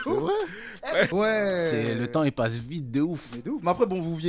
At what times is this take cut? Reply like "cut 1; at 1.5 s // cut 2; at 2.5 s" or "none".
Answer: cut 1; at 1.1 s

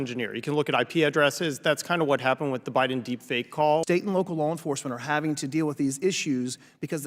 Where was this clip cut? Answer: cut 1; at 3.8 s

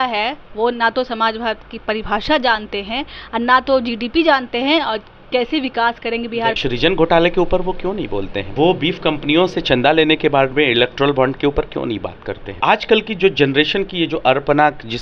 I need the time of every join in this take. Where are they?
cut 1; at 6.5 s // cut 2; at 8.5 s // cut 3; at 12.6 s

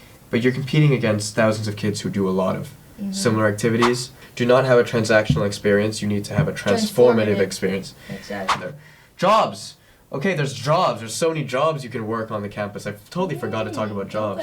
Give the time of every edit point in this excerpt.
cut 1; at 4.2 s // cut 2; at 8.5 s

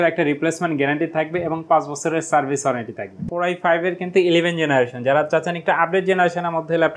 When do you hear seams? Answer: cut 1; at 3.3 s

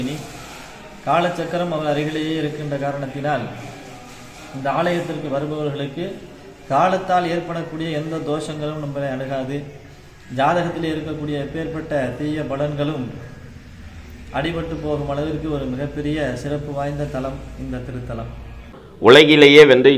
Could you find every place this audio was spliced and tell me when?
cut 1; at 18.8 s

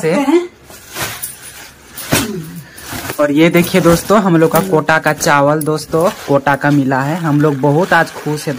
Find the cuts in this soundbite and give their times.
none

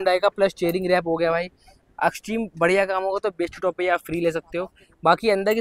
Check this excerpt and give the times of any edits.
none

